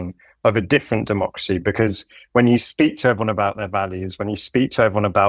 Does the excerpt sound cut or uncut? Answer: uncut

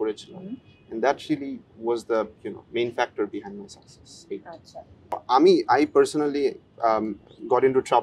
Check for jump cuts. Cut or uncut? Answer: cut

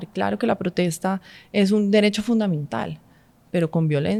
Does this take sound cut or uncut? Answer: uncut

